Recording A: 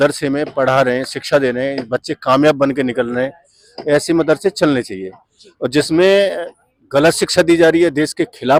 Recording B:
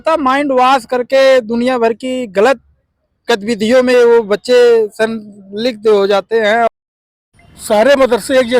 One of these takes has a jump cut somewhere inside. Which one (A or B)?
B